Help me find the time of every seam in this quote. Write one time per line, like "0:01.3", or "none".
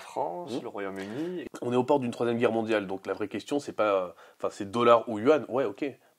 0:01.4

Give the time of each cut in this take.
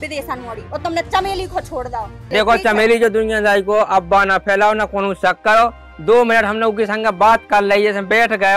0:02.2

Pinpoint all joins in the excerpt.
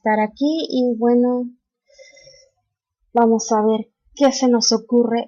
0:01.2

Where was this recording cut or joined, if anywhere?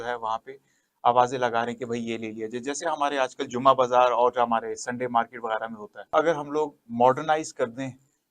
0:06.1

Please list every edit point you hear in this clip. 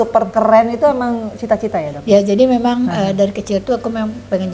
none

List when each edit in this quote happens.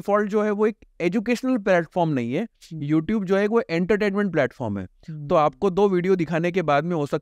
none

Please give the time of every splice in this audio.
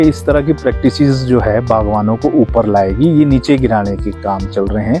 none

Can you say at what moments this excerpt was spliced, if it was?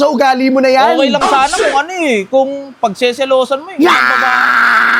none

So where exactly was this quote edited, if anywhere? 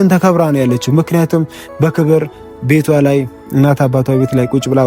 none

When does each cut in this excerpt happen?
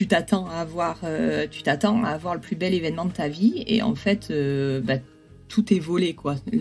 0:05.4

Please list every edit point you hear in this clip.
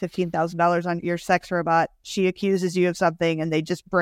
0:01.0

